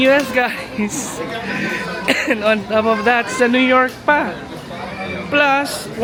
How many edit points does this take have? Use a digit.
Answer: 0